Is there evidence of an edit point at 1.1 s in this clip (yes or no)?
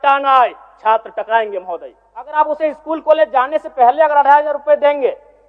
no